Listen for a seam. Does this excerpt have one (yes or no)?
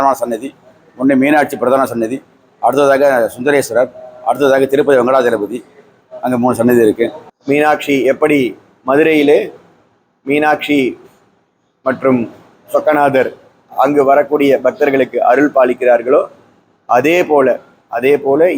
yes